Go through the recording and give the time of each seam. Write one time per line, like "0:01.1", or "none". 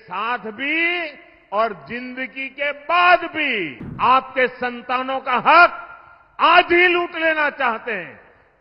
0:03.8